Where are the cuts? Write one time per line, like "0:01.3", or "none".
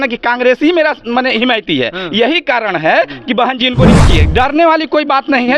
0:04.0